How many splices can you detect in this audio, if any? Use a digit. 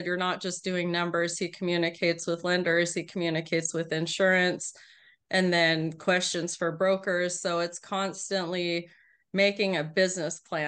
0